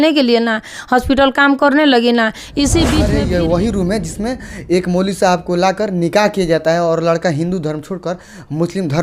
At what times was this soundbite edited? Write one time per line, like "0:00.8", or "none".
0:03.1